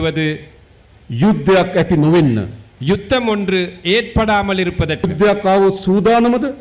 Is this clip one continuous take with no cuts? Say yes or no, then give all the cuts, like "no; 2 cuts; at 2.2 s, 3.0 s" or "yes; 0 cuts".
no; 1 cut; at 5.1 s